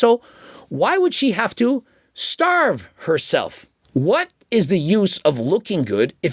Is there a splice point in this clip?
yes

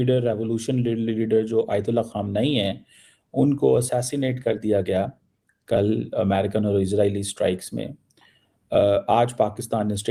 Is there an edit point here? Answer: no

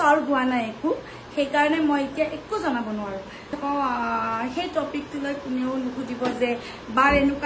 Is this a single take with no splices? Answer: no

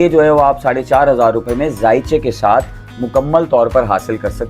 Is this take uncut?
yes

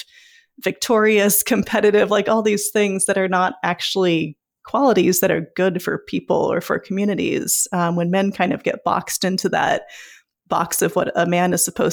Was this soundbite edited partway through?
no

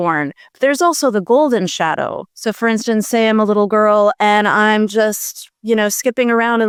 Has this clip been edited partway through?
no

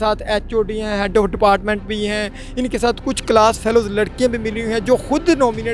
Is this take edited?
no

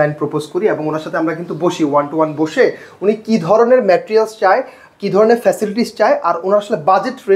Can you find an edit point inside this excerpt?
no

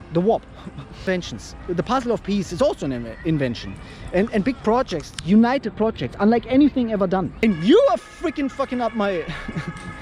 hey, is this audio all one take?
no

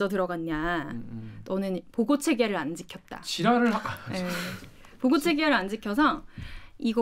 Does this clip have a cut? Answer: no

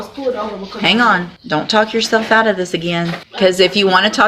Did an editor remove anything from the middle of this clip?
yes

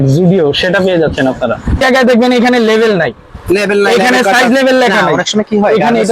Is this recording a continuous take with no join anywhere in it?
no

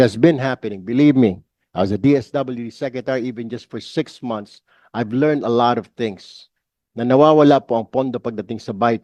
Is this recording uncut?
yes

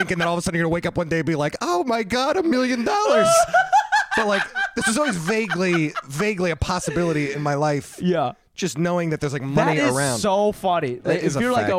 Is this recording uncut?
yes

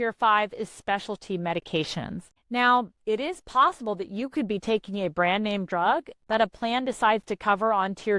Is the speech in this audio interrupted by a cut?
yes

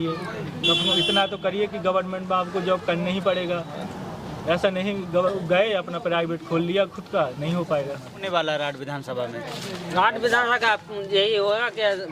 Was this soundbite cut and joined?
yes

